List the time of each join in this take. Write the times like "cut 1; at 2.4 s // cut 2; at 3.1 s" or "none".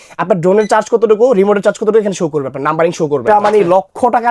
cut 1; at 3.2 s